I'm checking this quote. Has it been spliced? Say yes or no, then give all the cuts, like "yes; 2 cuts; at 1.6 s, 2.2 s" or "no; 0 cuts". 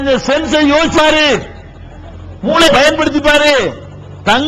yes; 2 cuts; at 1.0 s, 2.7 s